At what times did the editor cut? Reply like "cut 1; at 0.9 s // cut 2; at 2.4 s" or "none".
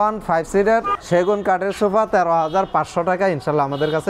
cut 1; at 1.0 s